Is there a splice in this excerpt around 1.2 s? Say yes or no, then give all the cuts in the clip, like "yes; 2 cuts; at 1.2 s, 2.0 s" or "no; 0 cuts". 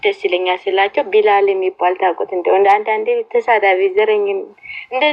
no; 0 cuts